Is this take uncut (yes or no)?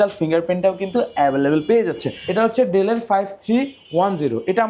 no